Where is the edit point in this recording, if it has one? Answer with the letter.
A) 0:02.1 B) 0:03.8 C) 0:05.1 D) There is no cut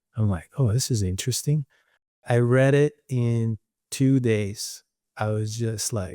A